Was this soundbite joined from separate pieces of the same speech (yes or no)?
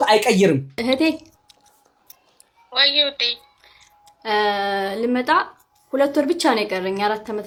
no